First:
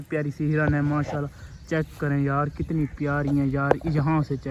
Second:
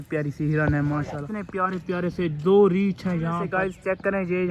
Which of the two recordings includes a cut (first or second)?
second